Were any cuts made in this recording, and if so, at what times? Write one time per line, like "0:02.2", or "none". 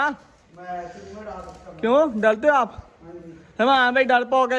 none